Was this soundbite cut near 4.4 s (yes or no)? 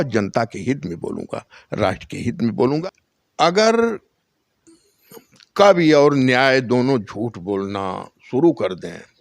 no